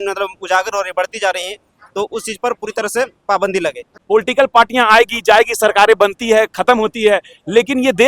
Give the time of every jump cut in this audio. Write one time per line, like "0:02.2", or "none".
0:03.9

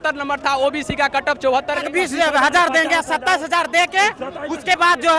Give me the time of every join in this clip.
0:01.9

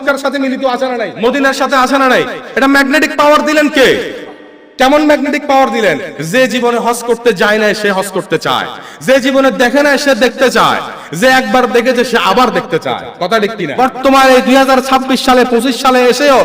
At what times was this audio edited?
0:01.1
0:13.9

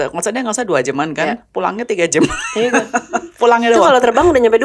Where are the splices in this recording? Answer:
none

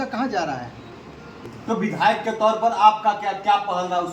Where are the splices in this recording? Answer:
0:01.5

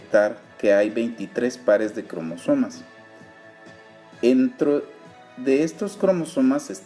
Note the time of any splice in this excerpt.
0:01.5

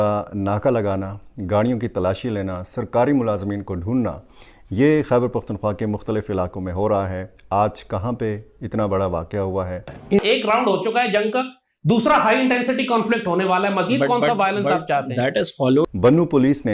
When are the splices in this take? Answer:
0:10.2
0:15.8

